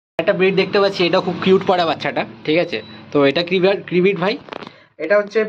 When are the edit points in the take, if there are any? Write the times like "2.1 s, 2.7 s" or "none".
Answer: none